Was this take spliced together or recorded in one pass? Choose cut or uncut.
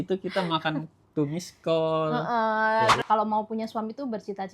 cut